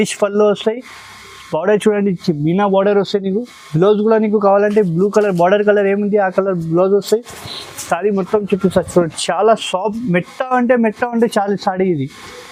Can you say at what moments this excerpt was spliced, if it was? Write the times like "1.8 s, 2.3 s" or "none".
none